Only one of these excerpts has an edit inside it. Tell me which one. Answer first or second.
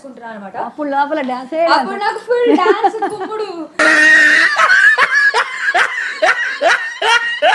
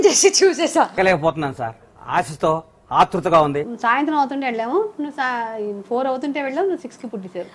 second